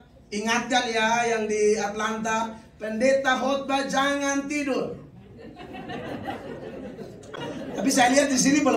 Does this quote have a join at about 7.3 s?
yes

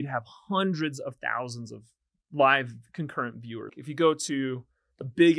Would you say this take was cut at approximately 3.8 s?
yes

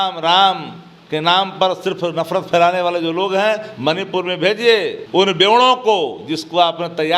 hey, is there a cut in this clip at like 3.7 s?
no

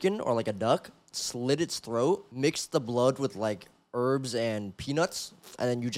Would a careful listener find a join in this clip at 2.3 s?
yes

